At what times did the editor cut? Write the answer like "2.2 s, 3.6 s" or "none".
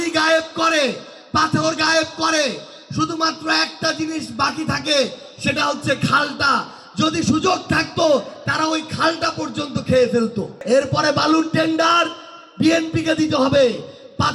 10.6 s